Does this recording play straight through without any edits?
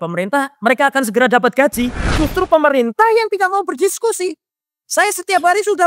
no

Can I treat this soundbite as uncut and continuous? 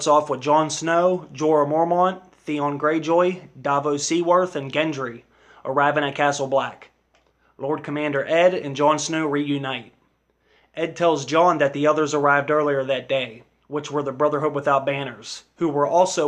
no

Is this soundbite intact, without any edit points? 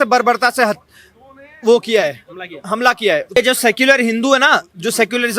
no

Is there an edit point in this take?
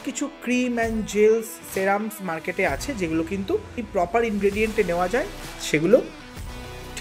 yes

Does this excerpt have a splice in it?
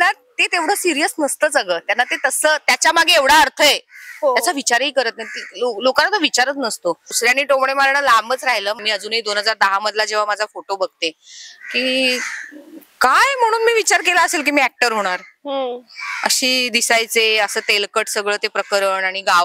yes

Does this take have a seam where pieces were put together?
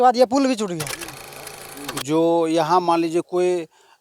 yes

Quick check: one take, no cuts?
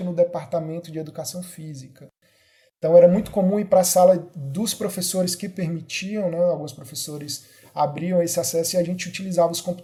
yes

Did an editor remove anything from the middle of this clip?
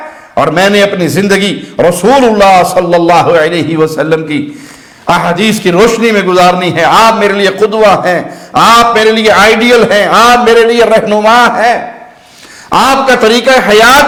no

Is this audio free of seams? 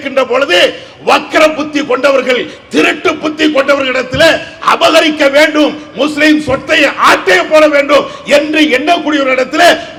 yes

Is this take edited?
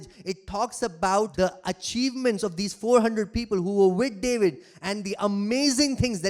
yes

